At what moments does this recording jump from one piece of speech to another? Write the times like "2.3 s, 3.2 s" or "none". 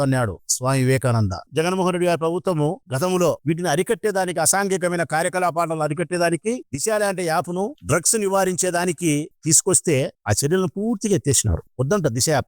1.5 s